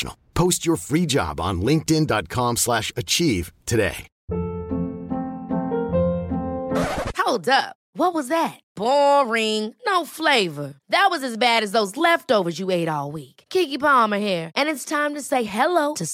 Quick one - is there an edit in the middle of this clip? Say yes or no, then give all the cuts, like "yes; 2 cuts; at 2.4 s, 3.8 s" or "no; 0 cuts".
no; 0 cuts